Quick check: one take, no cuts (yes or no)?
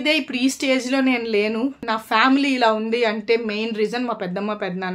no